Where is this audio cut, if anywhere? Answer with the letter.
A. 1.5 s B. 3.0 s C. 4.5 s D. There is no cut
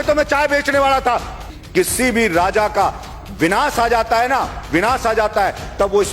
A